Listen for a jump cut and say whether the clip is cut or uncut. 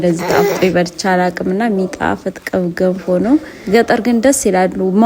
cut